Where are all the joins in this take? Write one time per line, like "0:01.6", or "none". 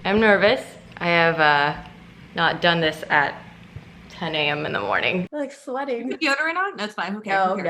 0:05.3